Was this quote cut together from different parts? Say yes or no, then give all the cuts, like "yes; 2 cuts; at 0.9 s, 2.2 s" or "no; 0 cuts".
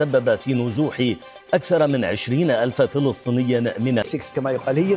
yes; 1 cut; at 4.1 s